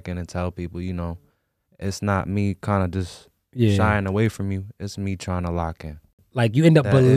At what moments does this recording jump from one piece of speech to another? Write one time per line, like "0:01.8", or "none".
0:06.2